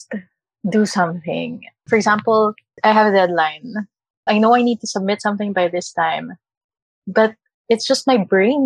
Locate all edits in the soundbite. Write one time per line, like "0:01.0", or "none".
none